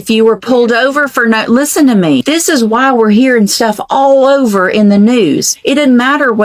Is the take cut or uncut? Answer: cut